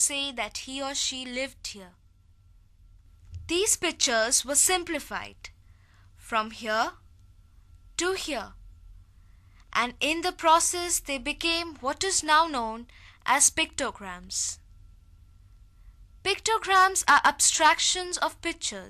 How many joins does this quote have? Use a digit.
1